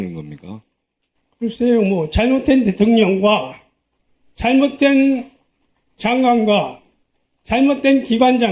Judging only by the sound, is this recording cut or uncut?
uncut